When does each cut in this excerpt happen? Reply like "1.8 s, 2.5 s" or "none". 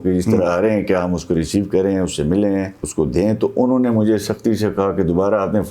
2.8 s